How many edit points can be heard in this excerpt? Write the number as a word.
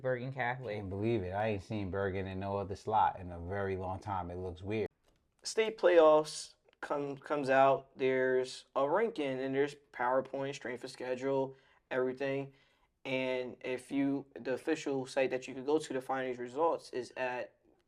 one